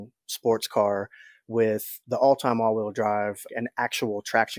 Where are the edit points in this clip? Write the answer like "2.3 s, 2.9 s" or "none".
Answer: 2.0 s, 3.4 s